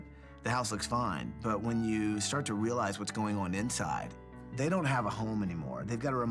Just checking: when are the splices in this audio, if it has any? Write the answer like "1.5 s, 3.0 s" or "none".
none